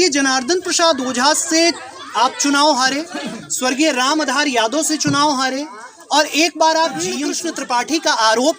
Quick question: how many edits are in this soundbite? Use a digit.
1